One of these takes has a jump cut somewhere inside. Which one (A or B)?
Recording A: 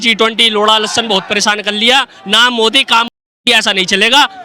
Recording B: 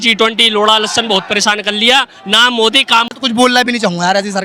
B